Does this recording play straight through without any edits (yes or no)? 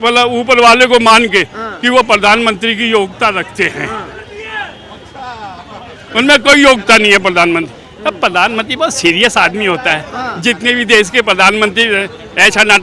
yes